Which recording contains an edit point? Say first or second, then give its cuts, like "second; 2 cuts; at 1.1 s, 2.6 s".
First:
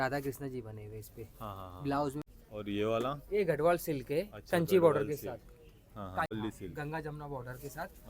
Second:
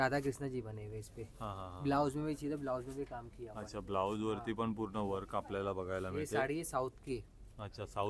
first; 2 cuts; at 2.2 s, 6.3 s